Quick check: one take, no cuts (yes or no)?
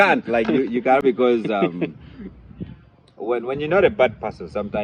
yes